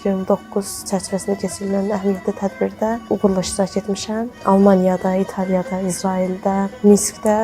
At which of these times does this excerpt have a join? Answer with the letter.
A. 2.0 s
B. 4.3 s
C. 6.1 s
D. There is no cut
B